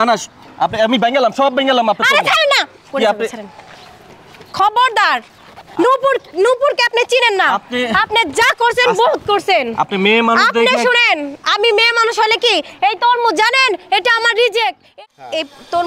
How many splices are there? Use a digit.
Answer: 1